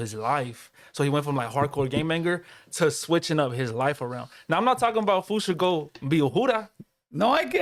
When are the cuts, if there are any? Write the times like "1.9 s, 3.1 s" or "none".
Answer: none